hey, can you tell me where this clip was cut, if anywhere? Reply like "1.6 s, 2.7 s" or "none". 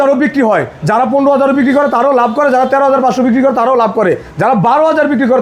none